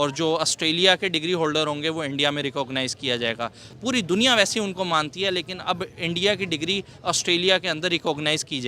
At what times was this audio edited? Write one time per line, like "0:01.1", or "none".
0:03.7

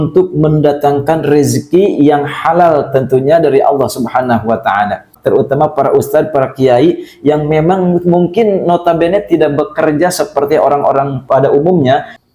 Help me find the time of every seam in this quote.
0:05.1

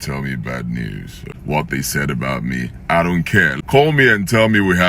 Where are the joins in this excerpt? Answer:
0:01.3
0:03.5

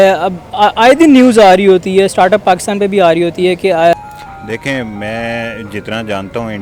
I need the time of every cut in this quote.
0:03.9

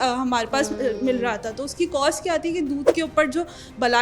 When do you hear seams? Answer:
none

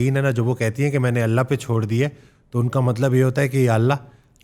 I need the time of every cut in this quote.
none

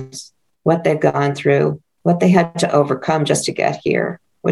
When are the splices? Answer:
0:01.9

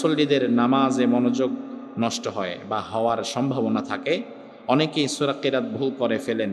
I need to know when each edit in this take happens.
none

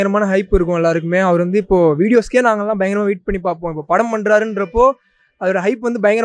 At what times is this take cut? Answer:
none

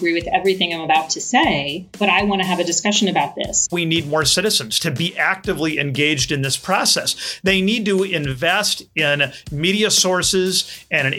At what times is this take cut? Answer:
0:01.8
0:03.7

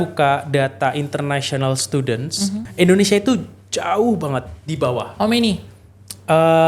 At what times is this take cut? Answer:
0:02.6

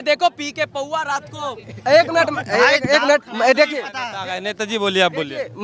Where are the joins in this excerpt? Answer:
none

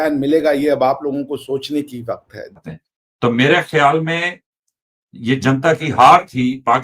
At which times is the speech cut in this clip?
0:02.5

